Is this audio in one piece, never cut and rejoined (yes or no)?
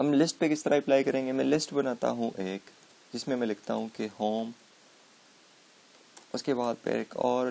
no